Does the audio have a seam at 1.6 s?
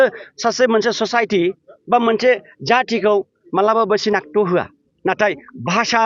no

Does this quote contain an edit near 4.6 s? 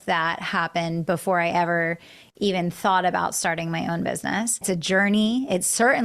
yes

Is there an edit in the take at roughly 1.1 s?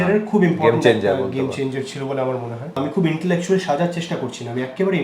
no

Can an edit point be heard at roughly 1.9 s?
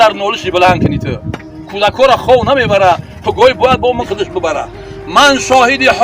no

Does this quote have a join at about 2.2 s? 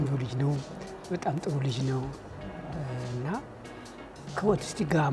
no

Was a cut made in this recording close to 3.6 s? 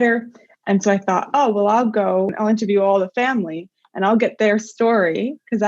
no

